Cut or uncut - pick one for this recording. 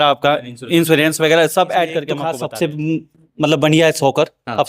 cut